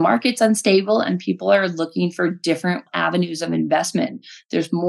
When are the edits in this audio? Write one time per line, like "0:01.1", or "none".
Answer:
0:02.9